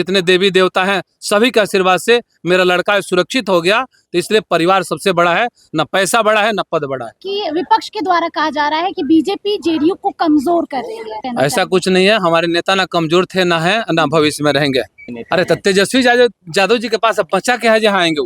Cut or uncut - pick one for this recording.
cut